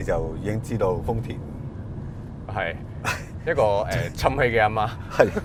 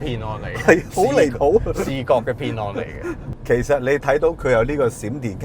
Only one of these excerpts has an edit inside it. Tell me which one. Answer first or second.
second